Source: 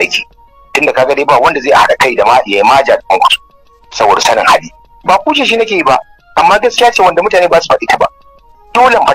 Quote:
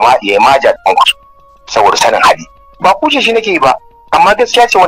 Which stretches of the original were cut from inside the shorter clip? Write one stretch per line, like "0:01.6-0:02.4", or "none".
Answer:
none